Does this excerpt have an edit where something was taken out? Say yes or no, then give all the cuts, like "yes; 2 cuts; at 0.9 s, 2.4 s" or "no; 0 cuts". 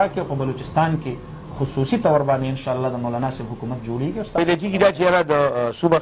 yes; 1 cut; at 4.4 s